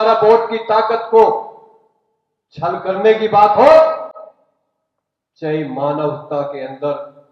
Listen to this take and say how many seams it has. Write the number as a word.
zero